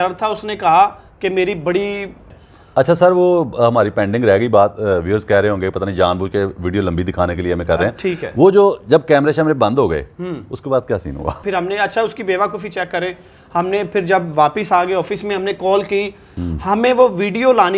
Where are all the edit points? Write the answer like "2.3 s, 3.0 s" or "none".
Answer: 2.3 s, 11.4 s, 16.3 s

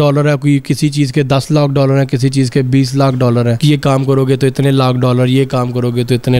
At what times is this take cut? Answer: none

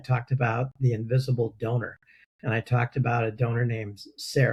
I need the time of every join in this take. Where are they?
none

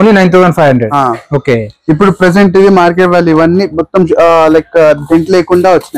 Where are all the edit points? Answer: none

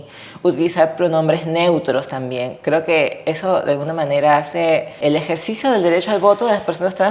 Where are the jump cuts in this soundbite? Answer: 5.0 s

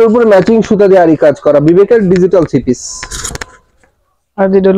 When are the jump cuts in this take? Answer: none

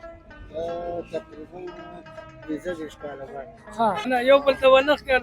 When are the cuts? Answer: 4.1 s

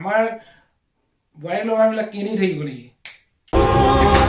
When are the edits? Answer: none

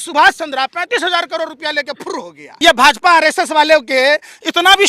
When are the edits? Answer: 2.4 s

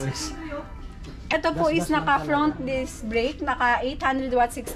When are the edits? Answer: 1.3 s

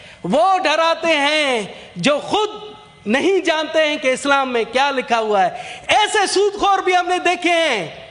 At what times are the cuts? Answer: none

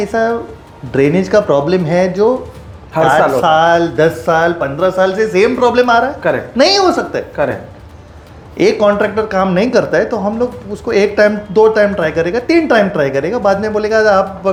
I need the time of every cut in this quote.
none

